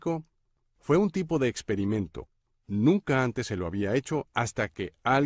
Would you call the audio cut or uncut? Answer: cut